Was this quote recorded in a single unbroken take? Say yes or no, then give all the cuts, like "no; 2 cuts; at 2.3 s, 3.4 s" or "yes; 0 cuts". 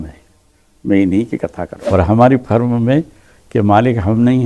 no; 1 cut; at 1.7 s